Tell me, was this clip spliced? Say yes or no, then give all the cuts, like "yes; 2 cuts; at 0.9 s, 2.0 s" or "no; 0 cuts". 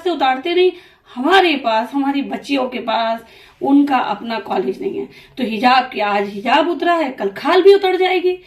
no; 0 cuts